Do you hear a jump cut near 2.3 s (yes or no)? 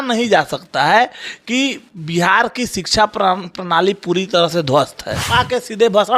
no